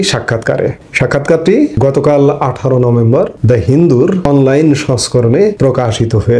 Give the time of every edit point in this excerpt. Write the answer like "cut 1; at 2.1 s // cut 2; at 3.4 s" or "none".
cut 1; at 0.8 s // cut 2; at 1.7 s // cut 3; at 3.4 s // cut 4; at 4.2 s // cut 5; at 5.6 s